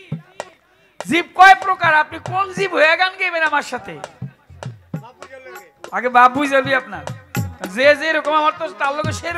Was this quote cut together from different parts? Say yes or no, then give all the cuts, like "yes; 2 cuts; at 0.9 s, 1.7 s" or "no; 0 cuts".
no; 0 cuts